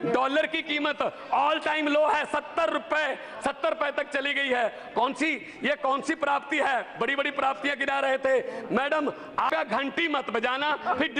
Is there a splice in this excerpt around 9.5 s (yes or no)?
yes